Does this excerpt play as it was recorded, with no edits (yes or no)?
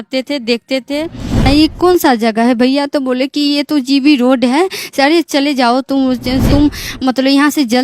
no